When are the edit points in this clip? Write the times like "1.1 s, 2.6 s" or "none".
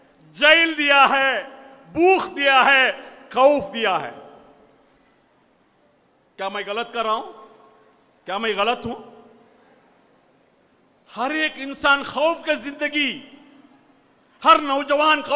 none